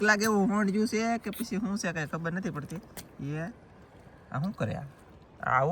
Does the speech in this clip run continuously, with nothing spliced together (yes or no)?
yes